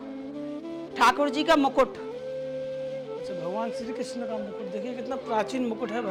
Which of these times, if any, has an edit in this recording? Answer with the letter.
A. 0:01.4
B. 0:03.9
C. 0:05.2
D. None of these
D